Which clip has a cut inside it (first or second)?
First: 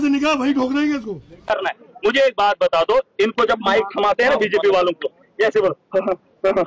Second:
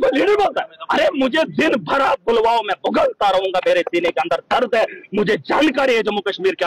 first